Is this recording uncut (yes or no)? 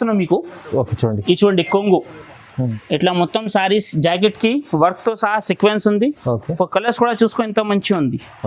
no